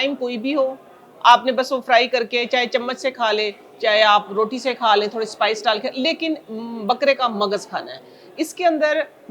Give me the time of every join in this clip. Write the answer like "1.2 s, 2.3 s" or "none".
none